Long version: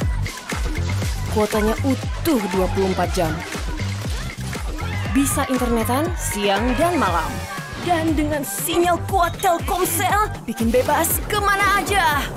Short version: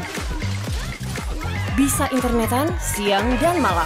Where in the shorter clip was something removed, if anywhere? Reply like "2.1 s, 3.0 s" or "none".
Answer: none